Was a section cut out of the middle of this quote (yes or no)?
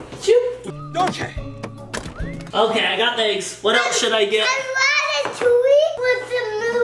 yes